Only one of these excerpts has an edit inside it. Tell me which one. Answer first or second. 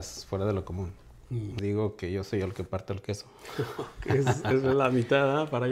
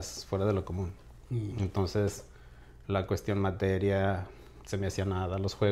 first